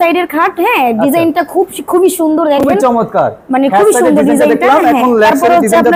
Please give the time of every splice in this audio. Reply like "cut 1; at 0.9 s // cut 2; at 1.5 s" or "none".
none